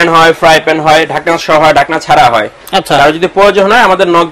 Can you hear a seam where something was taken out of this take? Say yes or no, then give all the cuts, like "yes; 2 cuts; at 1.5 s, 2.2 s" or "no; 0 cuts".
no; 0 cuts